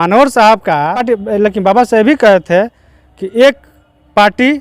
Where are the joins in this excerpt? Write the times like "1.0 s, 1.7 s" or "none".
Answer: 1.0 s